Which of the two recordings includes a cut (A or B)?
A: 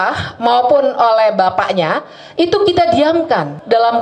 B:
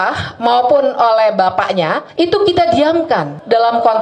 B